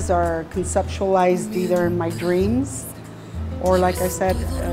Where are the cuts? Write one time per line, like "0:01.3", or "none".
none